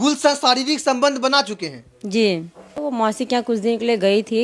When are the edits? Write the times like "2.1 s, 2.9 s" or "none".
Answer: 2.8 s